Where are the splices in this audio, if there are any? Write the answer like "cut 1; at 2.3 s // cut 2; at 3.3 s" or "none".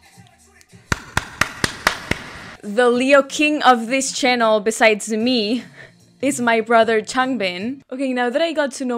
cut 1; at 7.8 s